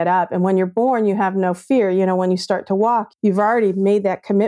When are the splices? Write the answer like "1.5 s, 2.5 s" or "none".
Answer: 3.1 s